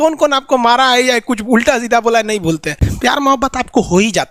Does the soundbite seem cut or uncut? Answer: cut